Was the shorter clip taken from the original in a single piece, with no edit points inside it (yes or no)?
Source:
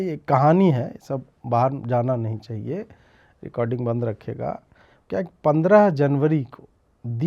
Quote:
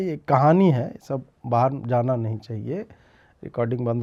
yes